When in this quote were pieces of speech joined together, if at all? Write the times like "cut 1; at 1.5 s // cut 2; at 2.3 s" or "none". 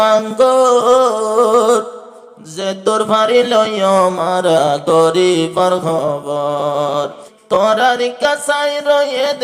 cut 1; at 7.2 s